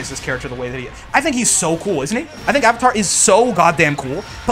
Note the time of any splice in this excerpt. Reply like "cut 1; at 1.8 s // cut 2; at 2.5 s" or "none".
none